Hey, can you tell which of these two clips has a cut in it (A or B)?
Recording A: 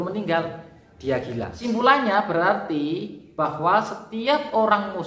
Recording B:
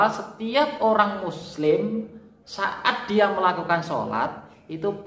A